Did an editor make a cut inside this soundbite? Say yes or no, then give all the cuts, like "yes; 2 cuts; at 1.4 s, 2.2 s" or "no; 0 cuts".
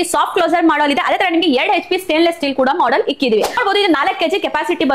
yes; 1 cut; at 3.6 s